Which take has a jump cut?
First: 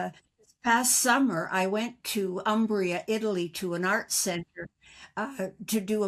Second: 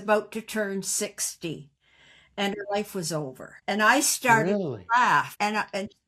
second; 2 cuts; at 3.5 s, 5.3 s

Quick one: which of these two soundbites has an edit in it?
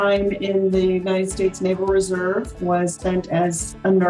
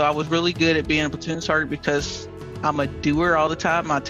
first; 1 cut; at 3.0 s

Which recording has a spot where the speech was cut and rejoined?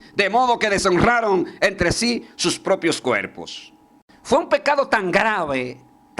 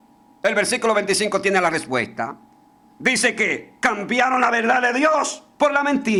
first; 1 cut; at 4.1 s

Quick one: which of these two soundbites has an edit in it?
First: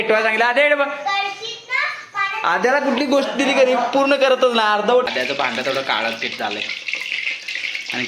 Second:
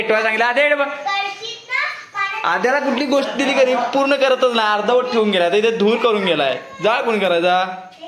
first; 1 cut; at 5.1 s

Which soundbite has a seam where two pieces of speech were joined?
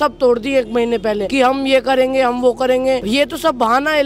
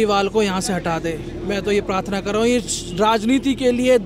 first; 2 cuts; at 1.3 s, 3.0 s

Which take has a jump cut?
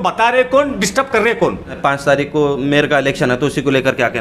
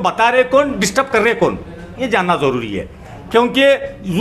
first; 1 cut; at 2.0 s

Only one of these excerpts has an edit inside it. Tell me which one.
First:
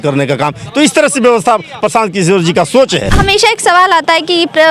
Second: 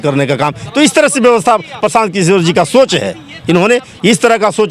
first; 1 cut; at 3.1 s

